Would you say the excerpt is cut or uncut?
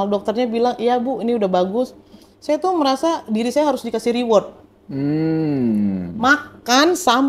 uncut